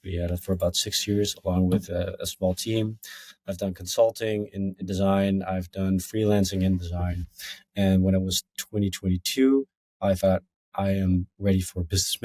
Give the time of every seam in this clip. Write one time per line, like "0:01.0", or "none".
none

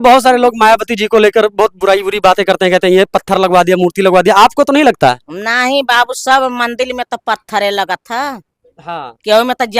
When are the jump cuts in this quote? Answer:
none

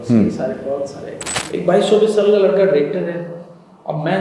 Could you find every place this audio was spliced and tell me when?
0:01.2

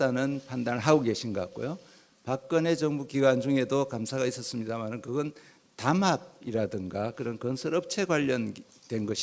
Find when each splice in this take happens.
0:05.9

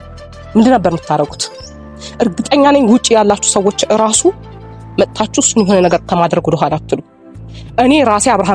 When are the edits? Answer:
none

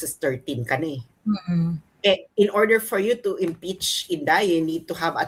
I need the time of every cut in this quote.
none

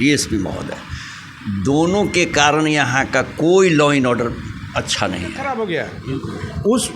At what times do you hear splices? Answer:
0:05.6

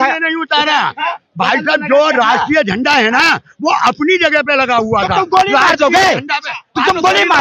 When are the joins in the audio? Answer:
none

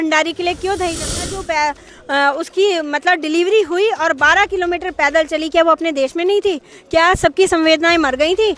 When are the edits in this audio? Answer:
0:01.3

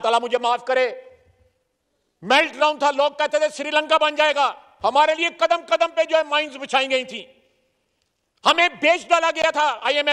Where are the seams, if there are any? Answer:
none

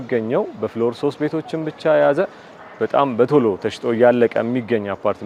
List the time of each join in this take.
none

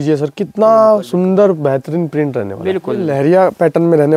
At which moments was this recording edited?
0:03.1

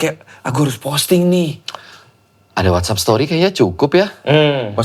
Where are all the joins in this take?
none

